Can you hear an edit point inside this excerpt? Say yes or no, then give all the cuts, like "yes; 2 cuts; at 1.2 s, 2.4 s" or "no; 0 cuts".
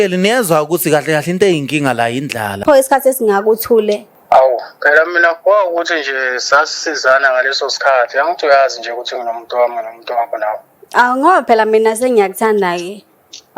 yes; 2 cuts; at 2.5 s, 4.1 s